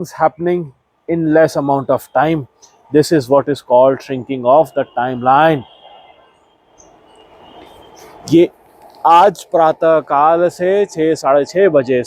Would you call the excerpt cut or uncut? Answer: uncut